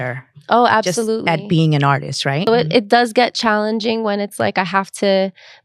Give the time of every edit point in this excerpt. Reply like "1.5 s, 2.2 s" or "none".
2.5 s